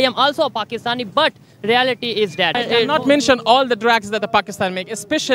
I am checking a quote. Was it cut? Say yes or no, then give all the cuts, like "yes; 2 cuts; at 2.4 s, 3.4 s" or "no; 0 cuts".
yes; 1 cut; at 2.6 s